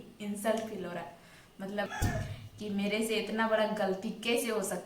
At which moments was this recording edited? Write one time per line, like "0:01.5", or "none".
0:01.9